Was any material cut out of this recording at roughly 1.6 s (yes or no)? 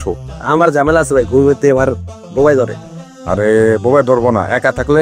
no